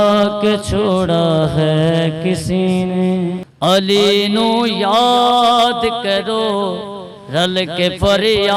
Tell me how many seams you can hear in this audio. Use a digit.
1